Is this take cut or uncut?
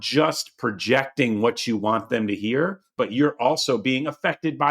cut